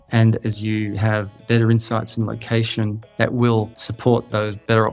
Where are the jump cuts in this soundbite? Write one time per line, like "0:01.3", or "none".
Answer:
0:03.0
0:03.8

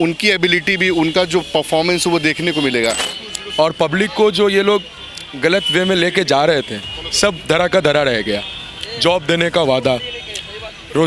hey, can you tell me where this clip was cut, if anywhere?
0:03.1

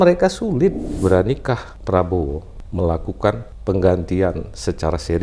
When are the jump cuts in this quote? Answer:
0:00.9
0:01.7
0:02.5
0:03.5

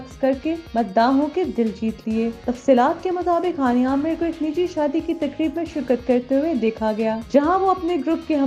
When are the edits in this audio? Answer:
none

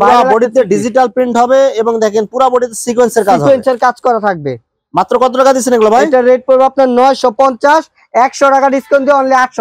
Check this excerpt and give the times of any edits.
none

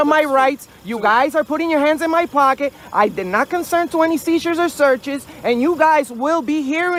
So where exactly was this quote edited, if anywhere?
none

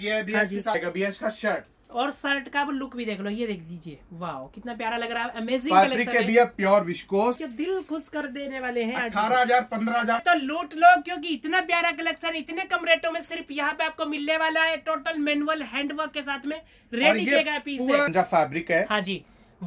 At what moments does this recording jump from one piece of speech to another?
0:00.7
0:07.4
0:10.2
0:18.1

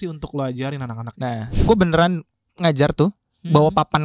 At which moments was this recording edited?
0:01.7

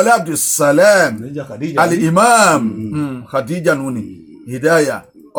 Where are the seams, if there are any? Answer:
none

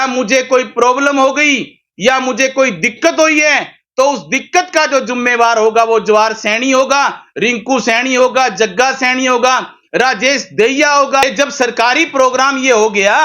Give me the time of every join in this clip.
0:11.2

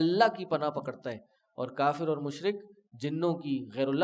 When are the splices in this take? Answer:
none

